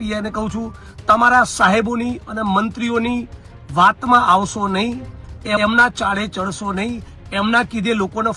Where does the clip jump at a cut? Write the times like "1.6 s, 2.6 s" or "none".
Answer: none